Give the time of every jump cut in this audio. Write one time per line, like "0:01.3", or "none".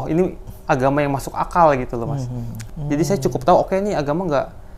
0:02.6